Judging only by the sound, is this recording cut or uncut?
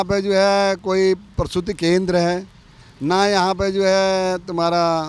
uncut